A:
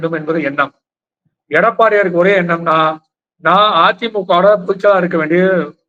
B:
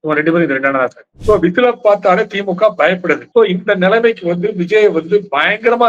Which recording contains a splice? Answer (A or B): B